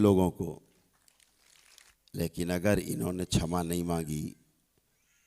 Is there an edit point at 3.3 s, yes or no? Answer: no